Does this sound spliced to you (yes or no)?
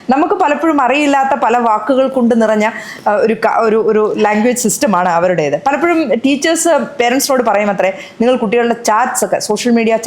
no